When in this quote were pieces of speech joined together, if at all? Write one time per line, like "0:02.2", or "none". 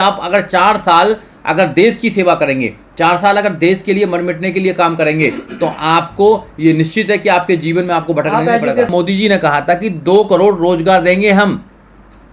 0:08.9